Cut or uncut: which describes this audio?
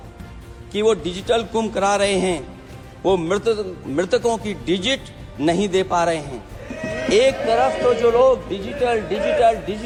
uncut